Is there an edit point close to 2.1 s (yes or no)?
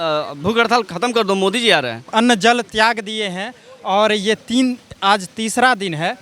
yes